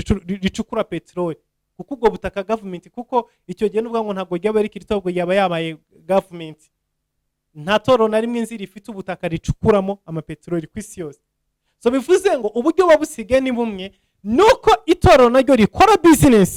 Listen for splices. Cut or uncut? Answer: uncut